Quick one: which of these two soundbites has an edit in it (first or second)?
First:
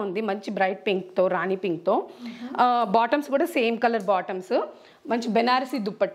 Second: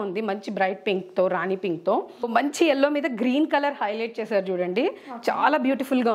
second